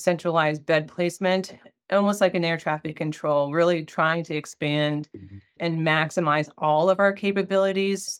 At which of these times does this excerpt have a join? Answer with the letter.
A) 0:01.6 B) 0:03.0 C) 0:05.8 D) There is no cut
A